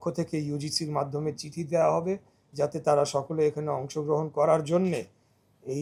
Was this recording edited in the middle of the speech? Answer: no; 0 cuts

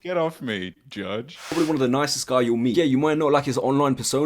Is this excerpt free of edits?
no; 1 cut; at 1.5 s

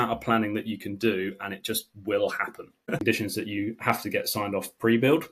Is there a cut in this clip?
yes; 1 cut; at 3.0 s

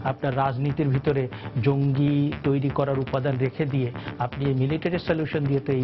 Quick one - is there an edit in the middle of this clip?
no; 0 cuts

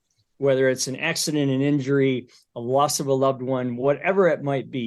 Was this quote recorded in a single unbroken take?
yes; 0 cuts

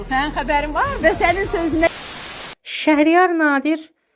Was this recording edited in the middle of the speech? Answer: yes; 1 cut; at 2.4 s

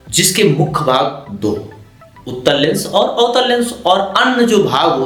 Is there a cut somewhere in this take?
no; 0 cuts

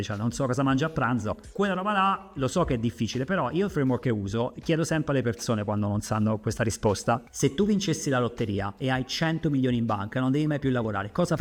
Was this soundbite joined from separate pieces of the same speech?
no; 0 cuts

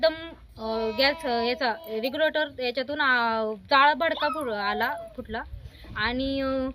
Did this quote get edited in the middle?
no; 0 cuts

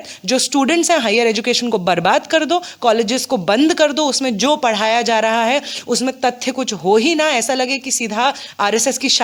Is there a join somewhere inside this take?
no; 0 cuts

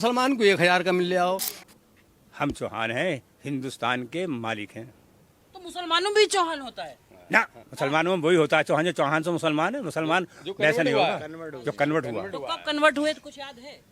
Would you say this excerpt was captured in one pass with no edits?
no; 1 cut; at 1.5 s

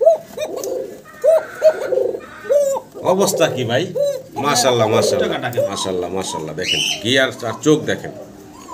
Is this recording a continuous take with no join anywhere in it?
no; 1 cut; at 5.7 s

